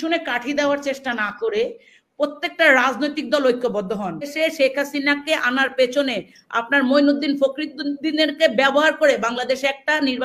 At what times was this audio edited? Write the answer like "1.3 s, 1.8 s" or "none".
4.3 s